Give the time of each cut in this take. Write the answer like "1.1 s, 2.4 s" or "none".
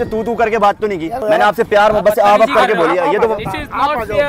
1.2 s

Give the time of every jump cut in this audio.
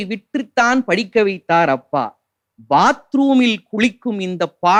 none

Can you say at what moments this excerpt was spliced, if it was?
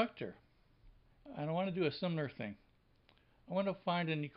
none

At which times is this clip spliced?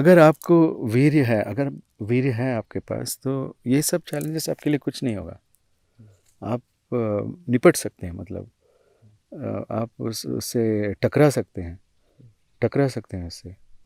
none

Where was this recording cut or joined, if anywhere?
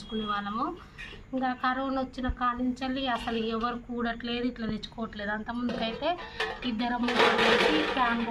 none

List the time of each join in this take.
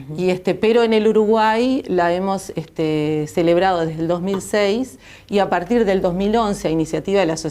3.9 s

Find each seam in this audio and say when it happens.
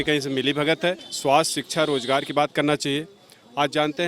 1.1 s

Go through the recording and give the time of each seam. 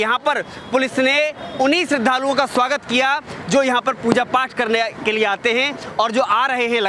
none

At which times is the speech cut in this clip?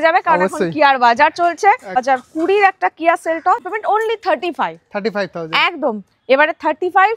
2.0 s, 3.6 s

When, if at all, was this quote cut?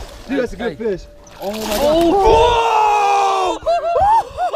none

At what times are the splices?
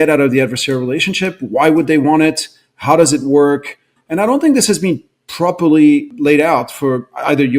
6.1 s

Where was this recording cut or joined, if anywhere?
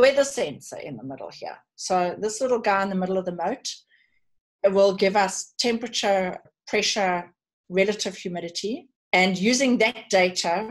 6.5 s, 8.9 s

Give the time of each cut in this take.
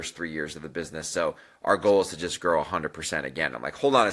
none

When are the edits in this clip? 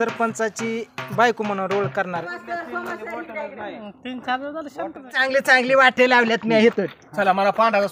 2.2 s, 5.0 s

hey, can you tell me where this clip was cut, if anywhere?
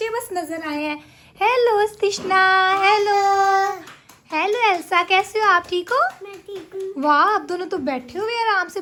none

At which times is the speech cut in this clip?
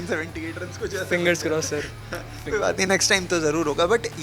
none

